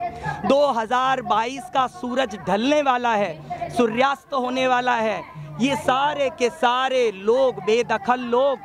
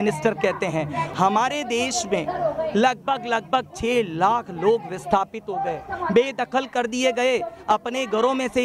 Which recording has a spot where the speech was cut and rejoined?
second; 1 cut; at 1.1 s

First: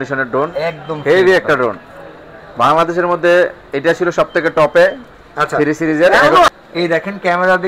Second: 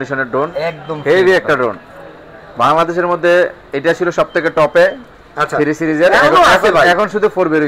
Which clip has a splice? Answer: first; 1 cut; at 6.5 s

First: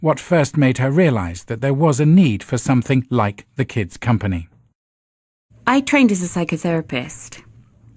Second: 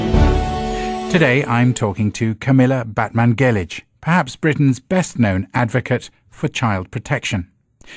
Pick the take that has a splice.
first; 1 cut; at 3.9 s

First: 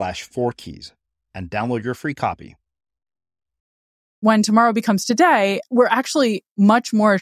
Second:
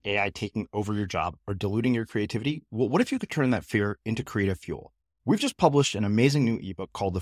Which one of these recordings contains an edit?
first; 2 cuts; at 4.2 s, 5.6 s

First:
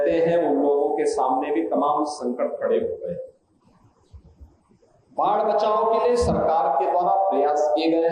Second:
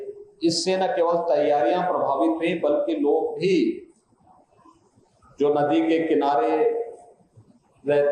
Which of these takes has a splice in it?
first; 1 cut; at 3.6 s

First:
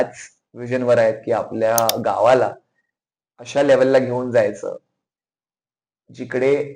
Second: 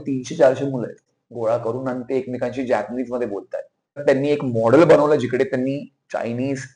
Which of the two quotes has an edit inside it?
second; 2 cuts; at 1.1 s, 4.0 s

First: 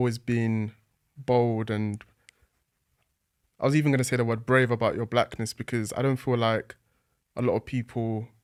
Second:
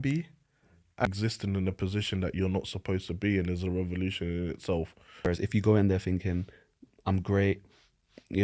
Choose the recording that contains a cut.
second; 2 cuts; at 1.1 s, 5.3 s

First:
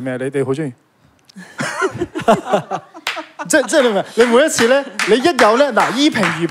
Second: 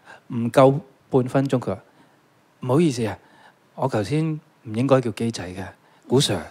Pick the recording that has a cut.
second; 1 cut; at 0.9 s

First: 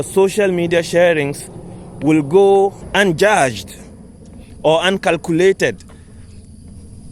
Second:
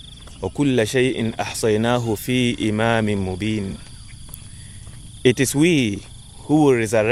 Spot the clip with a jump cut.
first; 1 cut; at 2.8 s

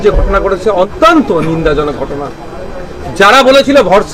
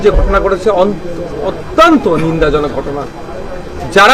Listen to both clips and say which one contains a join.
first; 1 cut; at 0.9 s

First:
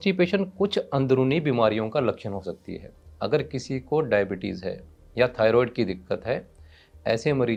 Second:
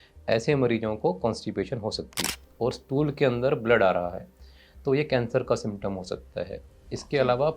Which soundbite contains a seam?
second; 1 cut; at 2.2 s

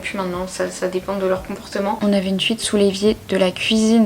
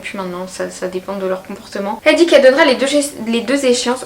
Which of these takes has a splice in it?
first; 1 cut; at 2.0 s

